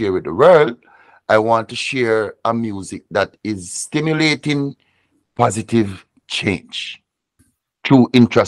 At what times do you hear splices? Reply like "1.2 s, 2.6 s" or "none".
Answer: 7.3 s